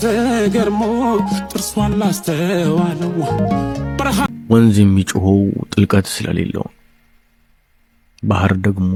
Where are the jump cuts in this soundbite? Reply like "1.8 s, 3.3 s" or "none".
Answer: none